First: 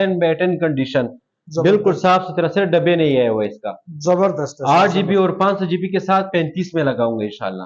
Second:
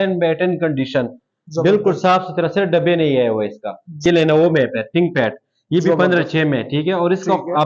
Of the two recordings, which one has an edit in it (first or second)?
second